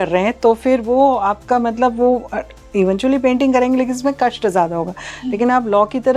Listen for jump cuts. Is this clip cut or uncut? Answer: uncut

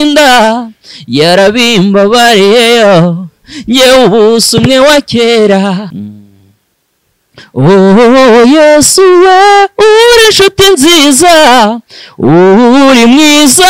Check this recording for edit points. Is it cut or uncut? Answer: cut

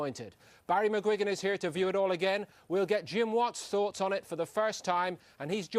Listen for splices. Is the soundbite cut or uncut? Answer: cut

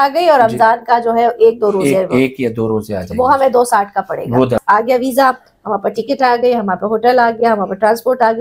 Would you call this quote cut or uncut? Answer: cut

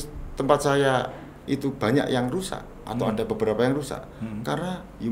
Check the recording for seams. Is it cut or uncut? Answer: uncut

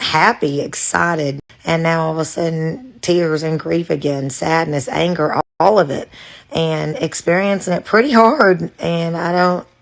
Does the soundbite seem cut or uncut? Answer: uncut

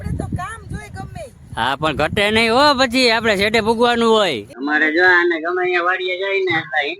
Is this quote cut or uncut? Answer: cut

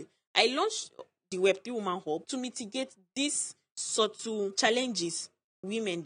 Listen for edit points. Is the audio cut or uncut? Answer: cut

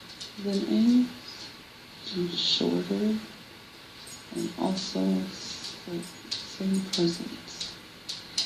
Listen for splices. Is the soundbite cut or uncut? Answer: cut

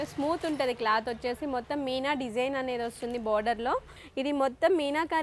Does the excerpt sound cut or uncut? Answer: cut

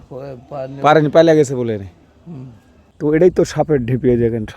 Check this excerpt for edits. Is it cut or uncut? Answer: cut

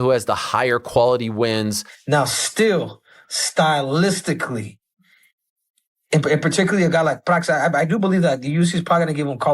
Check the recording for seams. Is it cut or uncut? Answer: cut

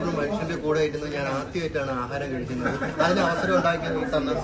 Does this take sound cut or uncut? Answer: uncut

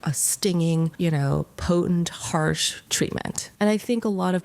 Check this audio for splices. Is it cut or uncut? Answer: cut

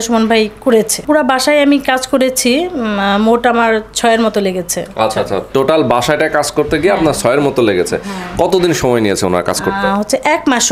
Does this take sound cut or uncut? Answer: cut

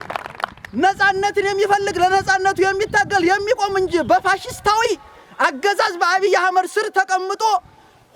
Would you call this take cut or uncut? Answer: uncut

